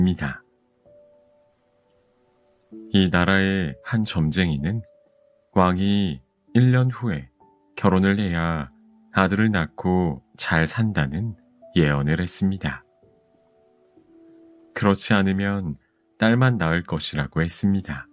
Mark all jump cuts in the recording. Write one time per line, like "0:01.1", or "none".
none